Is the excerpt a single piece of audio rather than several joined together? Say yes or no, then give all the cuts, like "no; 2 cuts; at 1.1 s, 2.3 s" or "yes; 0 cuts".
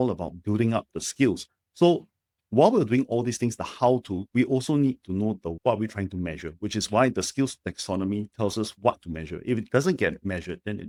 yes; 0 cuts